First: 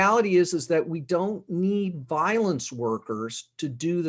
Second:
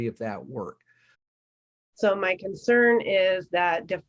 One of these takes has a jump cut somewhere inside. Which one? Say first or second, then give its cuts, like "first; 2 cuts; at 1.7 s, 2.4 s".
second; 1 cut; at 1.4 s